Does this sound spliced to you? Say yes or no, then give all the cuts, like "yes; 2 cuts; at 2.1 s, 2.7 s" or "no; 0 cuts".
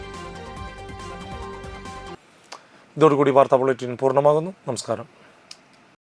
no; 0 cuts